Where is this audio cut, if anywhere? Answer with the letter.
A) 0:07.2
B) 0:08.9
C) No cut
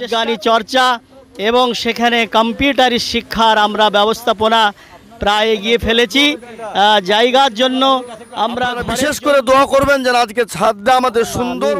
B